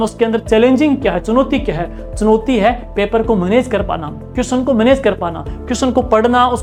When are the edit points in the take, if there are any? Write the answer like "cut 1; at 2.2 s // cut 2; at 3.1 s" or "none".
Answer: none

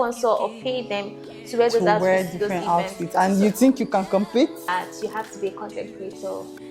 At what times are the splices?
cut 1; at 4.6 s

